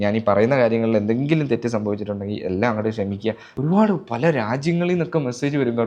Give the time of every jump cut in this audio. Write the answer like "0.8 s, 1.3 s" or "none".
3.4 s

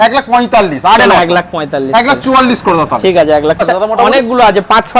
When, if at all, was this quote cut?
3.6 s

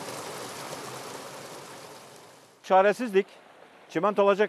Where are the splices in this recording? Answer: 2.6 s

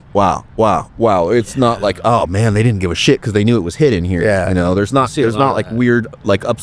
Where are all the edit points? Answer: none

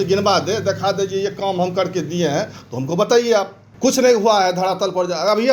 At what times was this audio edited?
3.6 s

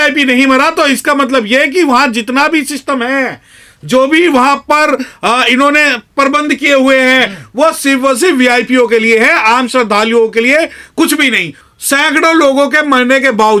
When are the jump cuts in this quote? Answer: 11.6 s

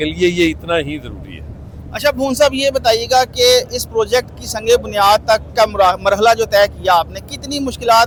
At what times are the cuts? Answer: none

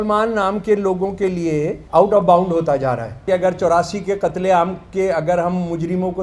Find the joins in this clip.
1.8 s, 3.2 s

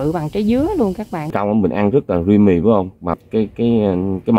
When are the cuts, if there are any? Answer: 1.2 s, 3.2 s

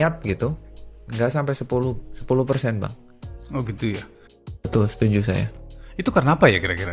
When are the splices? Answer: none

